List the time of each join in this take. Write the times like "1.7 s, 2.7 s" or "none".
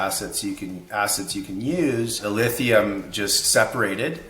2.2 s